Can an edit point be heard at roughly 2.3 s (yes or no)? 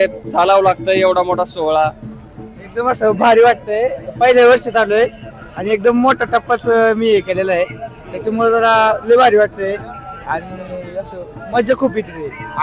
no